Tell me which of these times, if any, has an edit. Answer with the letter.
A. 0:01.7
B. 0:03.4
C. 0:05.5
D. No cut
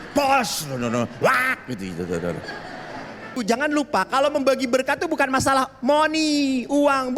B